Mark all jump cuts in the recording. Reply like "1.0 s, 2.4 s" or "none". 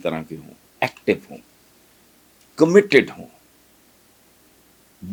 none